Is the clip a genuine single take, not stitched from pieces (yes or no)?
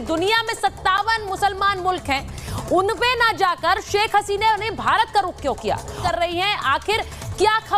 no